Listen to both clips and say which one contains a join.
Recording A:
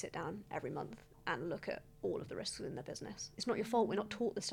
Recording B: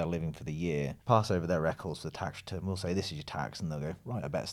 A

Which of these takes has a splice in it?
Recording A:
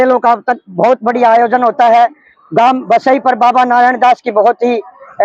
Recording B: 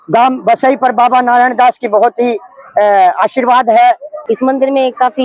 B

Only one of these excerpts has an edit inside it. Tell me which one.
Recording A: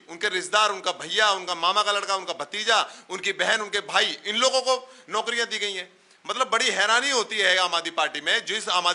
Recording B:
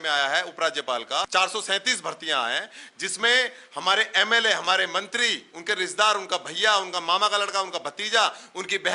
B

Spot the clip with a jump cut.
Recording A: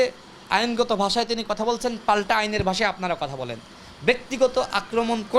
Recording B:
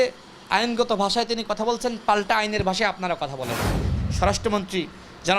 B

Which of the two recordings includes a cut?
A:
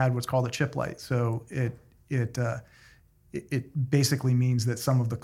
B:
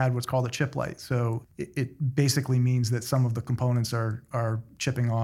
B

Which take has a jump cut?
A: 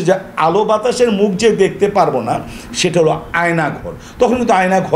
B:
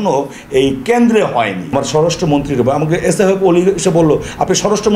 B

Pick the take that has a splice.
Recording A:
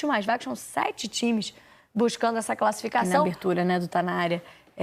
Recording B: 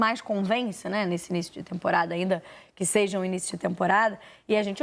A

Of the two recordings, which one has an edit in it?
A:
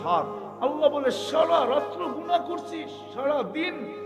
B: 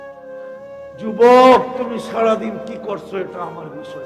B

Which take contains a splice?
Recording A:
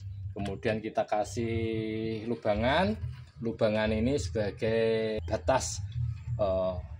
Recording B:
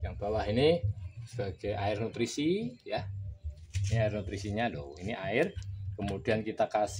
A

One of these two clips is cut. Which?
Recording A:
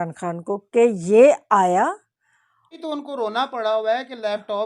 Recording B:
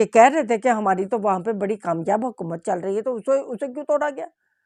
A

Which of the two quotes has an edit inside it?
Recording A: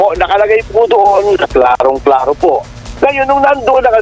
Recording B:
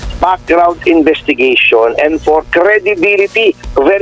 A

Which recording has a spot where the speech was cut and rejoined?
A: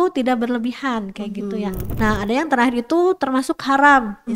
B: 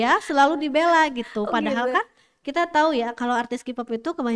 A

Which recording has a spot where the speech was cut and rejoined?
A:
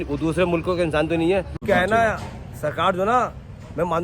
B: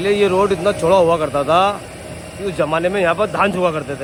A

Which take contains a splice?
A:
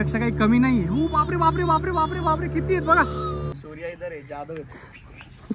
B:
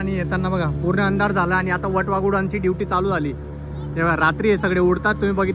A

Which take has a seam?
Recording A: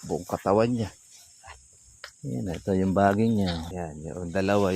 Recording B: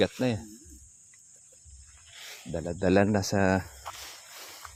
A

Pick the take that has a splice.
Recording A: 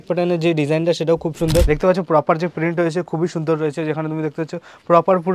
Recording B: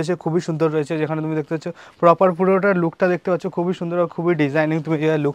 A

